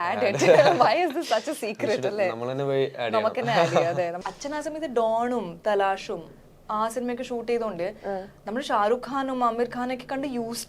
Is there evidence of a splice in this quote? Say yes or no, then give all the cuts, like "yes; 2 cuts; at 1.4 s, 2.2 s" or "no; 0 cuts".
yes; 1 cut; at 4.3 s